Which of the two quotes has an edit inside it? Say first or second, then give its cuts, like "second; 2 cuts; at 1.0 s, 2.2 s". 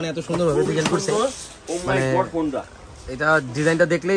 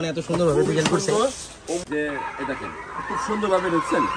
second; 1 cut; at 1.8 s